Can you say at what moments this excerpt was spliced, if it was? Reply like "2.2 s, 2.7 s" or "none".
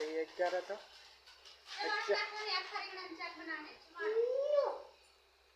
none